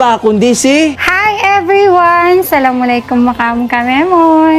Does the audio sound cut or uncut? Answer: uncut